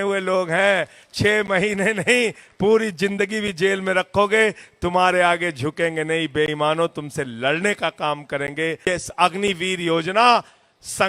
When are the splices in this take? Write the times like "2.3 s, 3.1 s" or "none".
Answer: 8.8 s